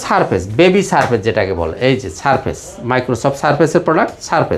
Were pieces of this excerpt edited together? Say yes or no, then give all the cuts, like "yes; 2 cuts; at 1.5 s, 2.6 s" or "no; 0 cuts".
no; 0 cuts